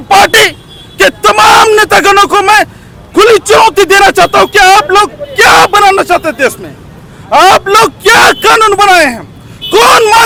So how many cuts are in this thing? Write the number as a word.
zero